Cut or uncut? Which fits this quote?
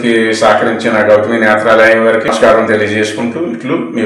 cut